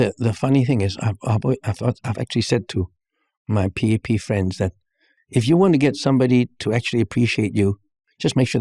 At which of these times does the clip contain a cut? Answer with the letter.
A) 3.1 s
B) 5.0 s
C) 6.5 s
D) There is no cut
D